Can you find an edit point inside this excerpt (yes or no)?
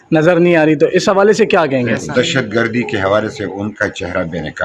yes